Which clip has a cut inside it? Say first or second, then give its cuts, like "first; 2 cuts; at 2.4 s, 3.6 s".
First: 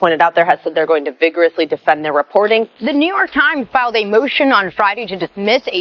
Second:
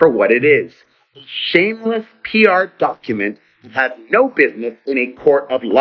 first; 2 cuts; at 2.8 s, 3.9 s